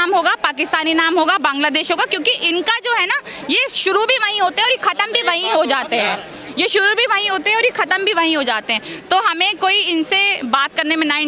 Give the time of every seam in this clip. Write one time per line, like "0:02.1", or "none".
none